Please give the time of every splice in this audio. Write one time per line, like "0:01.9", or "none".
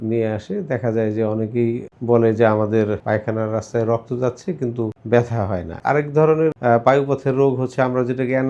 0:01.9
0:03.0
0:05.0
0:05.7
0:06.6